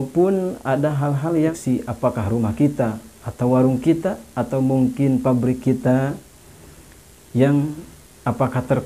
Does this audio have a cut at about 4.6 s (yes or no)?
no